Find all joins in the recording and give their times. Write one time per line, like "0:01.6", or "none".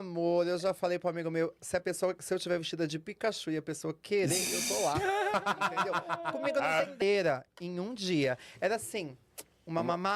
0:07.0